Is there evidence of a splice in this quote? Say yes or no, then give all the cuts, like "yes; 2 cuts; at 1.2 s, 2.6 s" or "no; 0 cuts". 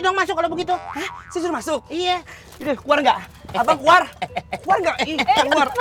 no; 0 cuts